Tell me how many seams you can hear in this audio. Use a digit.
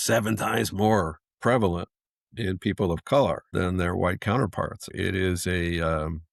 2